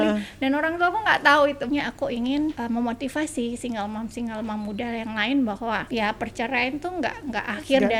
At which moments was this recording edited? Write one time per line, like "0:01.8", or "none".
0:01.6
0:02.6
0:05.8